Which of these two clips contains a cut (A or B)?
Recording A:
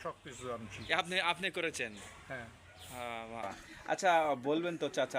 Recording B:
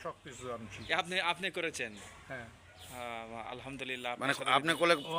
A